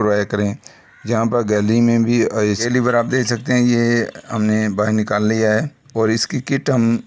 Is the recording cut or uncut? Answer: cut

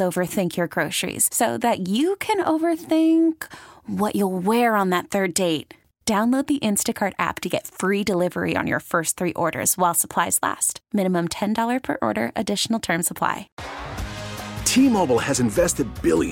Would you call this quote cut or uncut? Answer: cut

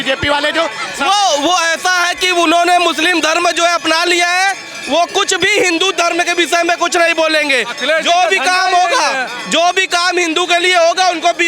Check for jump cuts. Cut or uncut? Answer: uncut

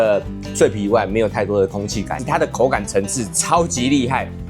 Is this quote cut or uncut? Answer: cut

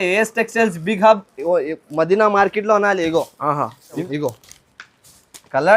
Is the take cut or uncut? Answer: cut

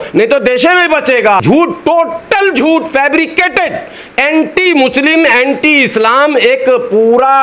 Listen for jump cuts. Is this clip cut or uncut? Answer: cut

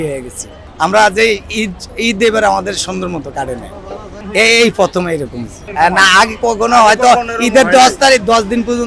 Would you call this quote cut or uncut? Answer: uncut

